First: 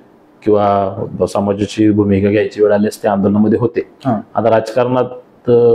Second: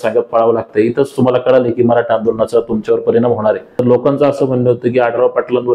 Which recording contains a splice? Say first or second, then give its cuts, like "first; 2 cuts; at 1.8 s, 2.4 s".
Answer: second; 1 cut; at 3.7 s